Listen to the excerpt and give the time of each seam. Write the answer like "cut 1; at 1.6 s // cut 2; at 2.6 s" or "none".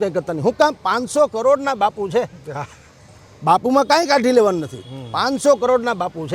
none